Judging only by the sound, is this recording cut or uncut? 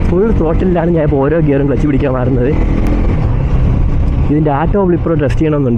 uncut